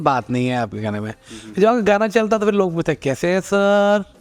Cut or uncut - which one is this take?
uncut